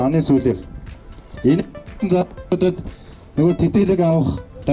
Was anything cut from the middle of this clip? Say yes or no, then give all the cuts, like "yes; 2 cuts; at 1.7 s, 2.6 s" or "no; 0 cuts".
no; 0 cuts